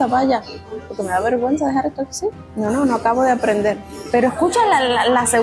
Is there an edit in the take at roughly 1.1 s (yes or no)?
no